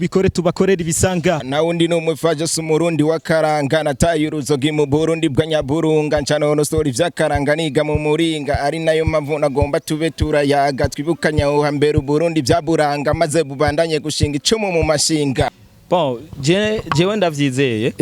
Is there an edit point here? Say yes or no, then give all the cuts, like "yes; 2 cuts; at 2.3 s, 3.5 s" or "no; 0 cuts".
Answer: yes; 2 cuts; at 1.4 s, 15.6 s